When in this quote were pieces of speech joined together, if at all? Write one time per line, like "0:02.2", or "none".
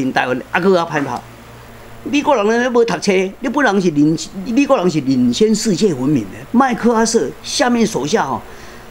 0:01.6